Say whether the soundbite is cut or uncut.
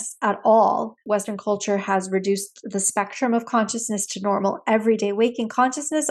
cut